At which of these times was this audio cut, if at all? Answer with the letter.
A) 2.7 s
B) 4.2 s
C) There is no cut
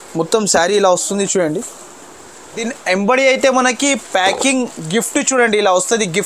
A